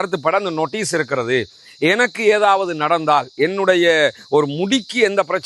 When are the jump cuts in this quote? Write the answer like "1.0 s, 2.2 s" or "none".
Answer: none

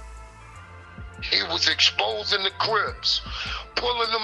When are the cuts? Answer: none

